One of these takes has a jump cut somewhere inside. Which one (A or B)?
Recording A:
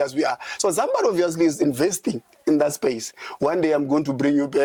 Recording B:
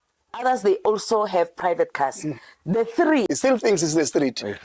B